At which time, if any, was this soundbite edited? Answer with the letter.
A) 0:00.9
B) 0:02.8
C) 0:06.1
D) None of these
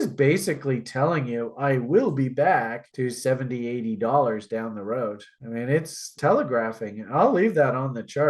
C